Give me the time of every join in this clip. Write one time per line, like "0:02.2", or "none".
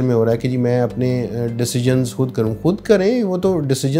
none